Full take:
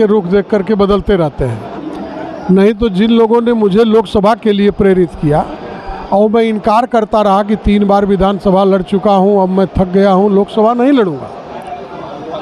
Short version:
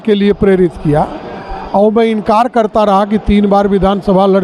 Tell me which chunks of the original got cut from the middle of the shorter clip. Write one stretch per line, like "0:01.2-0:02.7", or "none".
none